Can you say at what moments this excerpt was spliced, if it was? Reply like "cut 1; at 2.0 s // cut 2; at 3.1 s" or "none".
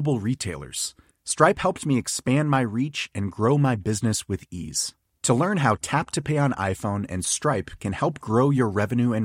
none